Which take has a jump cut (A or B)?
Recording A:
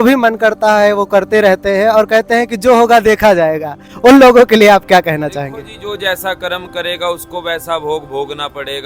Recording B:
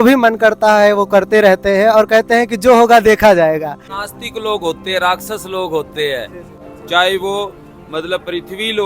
B